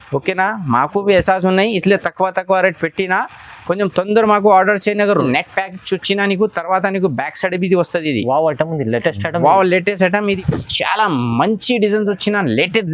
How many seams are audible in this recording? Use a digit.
2